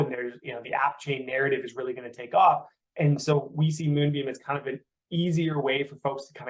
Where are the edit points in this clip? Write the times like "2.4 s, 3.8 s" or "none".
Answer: none